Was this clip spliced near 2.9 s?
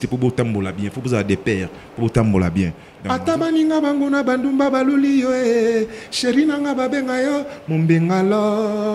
yes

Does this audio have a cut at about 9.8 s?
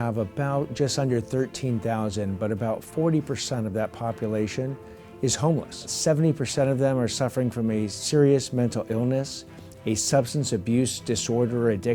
no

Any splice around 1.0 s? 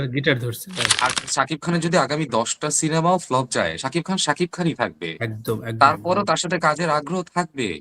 yes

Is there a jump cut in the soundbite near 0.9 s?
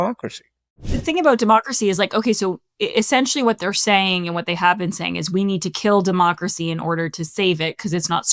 yes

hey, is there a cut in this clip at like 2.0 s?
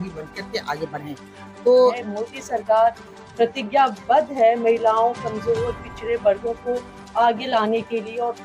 yes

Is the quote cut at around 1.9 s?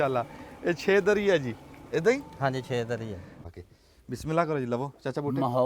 no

